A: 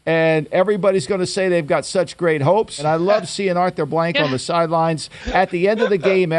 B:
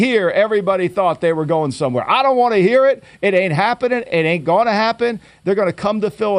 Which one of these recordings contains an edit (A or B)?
A